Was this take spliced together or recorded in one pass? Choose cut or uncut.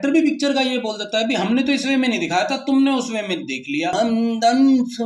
cut